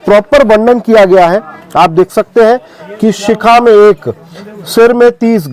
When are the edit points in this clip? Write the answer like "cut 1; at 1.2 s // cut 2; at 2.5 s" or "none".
none